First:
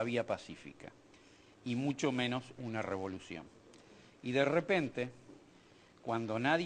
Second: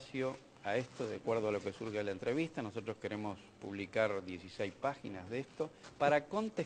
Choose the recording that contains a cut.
first; 1 cut; at 5.7 s

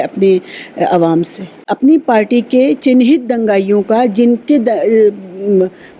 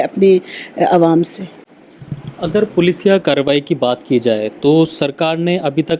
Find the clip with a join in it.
first; 1 cut; at 1.6 s

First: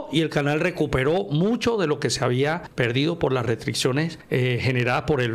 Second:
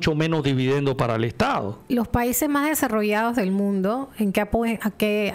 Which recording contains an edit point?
first; 2 cuts; at 2.7 s, 4.2 s

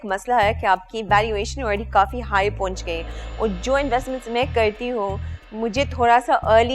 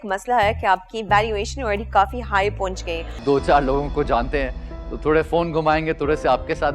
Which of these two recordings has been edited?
second; 1 cut; at 3.1 s

